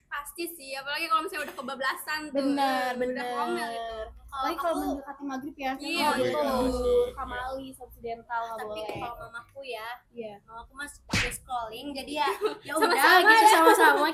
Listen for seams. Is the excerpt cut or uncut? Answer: uncut